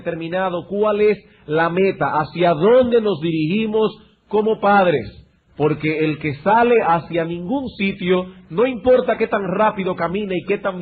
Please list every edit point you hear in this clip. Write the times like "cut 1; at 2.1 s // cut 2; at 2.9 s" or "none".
cut 1; at 9.1 s